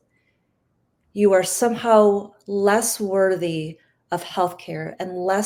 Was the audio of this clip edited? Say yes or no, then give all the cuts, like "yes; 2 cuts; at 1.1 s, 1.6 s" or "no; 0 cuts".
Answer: no; 0 cuts